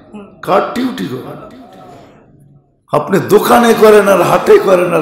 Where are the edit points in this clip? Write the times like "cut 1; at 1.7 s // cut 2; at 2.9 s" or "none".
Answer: cut 1; at 2.2 s